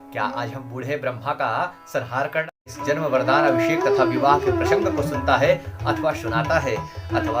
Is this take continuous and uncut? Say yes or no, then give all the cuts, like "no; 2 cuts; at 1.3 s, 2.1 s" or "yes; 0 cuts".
no; 1 cut; at 2.5 s